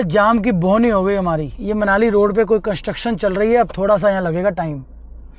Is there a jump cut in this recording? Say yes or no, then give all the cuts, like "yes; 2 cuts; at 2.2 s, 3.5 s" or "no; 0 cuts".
no; 0 cuts